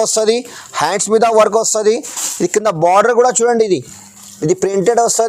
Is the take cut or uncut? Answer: uncut